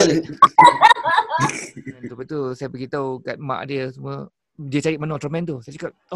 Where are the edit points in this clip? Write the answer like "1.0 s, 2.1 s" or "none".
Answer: 2.1 s